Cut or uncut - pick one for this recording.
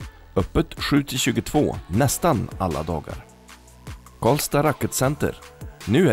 uncut